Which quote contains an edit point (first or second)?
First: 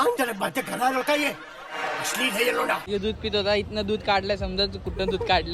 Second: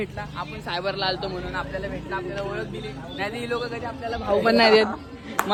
first